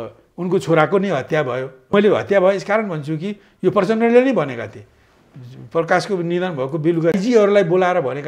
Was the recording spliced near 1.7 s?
yes; 2 cuts; at 1.7 s, 7.1 s

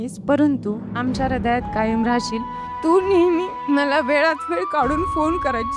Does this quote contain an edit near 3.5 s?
yes; 2 cuts; at 2.7 s, 3.5 s

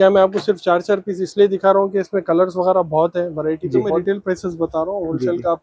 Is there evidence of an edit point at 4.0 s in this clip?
yes; 1 cut; at 4.0 s

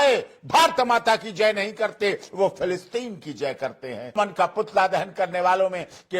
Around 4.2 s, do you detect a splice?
yes; 1 cut; at 4.2 s

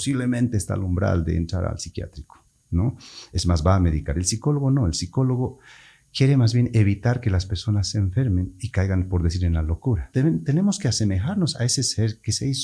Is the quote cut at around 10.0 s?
yes; 1 cut; at 10.0 s

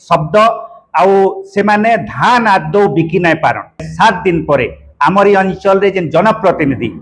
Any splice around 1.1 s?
no; 1 cut; at 3.9 s

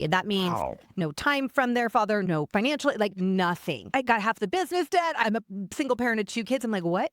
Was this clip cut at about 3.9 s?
yes; 2 cuts; at 1.0 s, 3.9 s

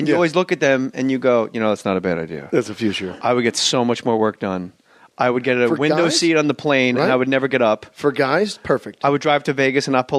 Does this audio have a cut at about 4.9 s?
yes; 1 cut; at 4.9 s

